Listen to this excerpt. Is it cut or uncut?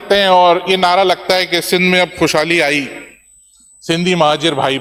uncut